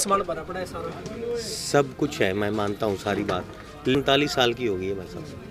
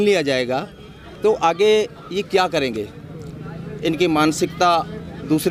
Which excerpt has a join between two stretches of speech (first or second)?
first